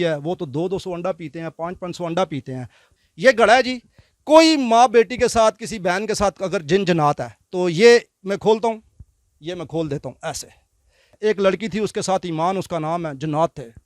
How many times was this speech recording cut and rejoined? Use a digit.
2